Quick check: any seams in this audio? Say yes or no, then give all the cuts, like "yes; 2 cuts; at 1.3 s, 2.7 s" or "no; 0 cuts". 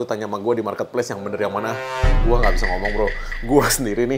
no; 0 cuts